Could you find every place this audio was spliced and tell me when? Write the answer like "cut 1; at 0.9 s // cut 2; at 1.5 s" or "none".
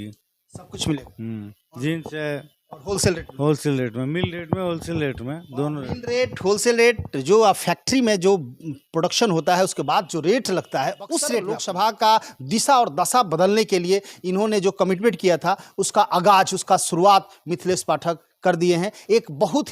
cut 1; at 11.6 s